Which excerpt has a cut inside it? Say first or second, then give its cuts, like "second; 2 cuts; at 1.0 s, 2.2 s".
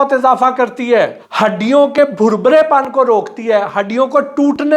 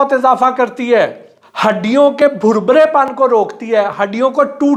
first; 1 cut; at 1.2 s